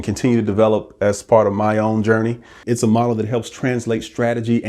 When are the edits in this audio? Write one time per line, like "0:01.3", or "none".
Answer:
0:02.5